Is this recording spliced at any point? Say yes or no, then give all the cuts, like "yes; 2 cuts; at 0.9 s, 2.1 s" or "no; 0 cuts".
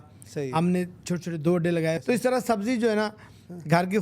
yes; 1 cut; at 2.0 s